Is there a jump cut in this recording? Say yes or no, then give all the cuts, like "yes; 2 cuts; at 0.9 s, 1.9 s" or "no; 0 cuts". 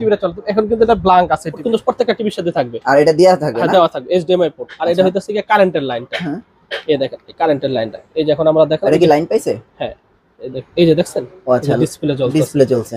yes; 1 cut; at 1.6 s